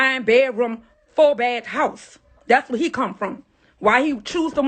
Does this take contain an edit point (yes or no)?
no